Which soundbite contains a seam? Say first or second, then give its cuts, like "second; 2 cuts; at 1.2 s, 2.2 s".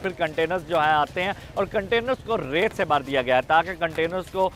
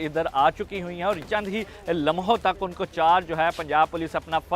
second; 1 cut; at 1.3 s